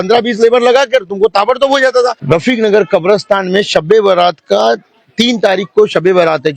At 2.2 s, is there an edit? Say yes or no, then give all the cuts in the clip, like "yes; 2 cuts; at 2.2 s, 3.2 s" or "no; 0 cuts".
yes; 1 cut; at 2.2 s